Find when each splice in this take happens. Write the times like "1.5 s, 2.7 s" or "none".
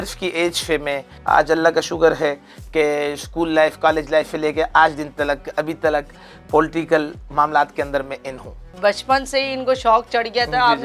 1.1 s, 8.6 s